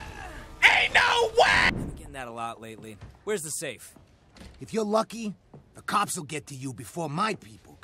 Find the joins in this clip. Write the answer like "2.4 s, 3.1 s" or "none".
1.7 s

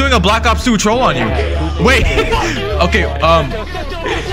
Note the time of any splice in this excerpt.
none

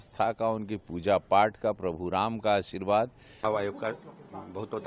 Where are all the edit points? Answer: 3.2 s

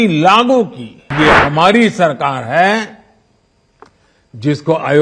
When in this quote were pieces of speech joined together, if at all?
1.1 s

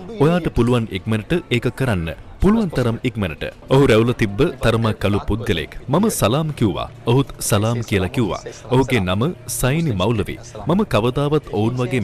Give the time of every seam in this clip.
3.6 s

